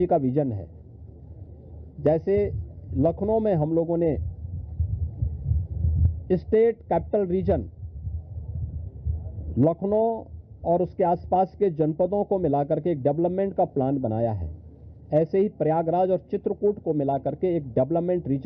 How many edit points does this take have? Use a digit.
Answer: 0